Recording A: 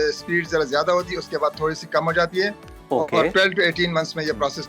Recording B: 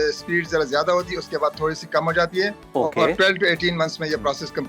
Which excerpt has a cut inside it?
B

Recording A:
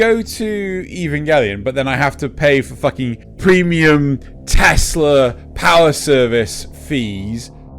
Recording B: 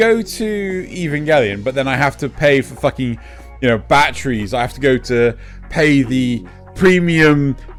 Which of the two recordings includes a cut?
A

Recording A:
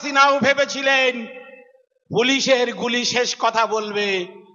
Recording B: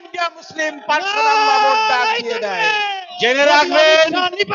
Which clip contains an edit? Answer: B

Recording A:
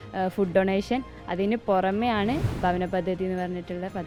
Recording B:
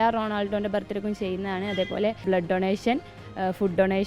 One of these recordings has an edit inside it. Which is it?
B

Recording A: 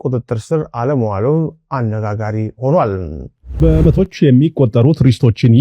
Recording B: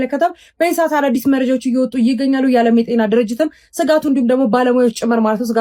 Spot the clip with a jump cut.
A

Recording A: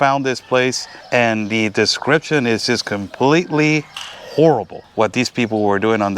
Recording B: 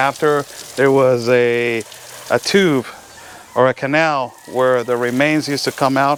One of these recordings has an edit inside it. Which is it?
A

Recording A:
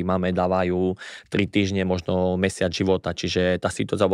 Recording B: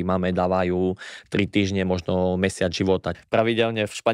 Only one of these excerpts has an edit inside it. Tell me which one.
B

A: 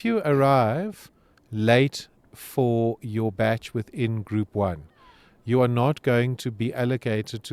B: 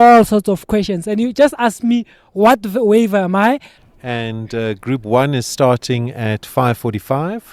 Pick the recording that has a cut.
B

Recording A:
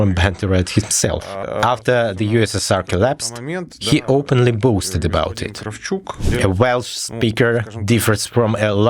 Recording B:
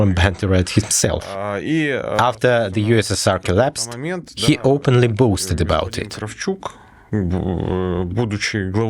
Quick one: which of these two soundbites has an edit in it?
A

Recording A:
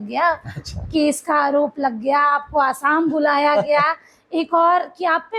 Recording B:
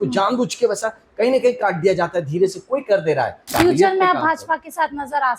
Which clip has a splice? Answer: B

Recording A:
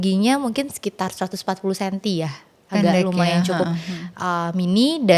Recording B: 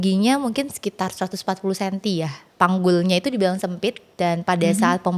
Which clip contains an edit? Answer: B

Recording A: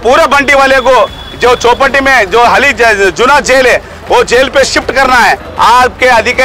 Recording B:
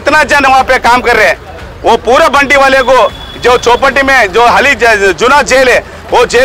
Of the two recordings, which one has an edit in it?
A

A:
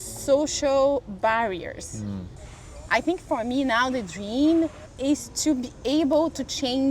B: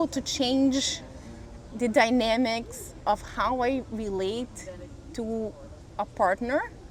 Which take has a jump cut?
A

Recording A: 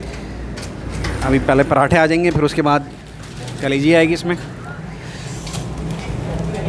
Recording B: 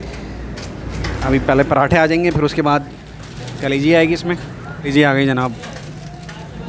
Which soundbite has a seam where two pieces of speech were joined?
B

